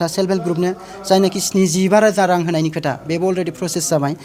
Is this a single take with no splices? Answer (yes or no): yes